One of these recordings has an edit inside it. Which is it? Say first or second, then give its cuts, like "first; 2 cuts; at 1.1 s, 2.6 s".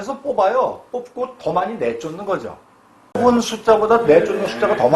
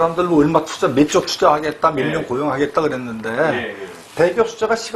first; 1 cut; at 3.2 s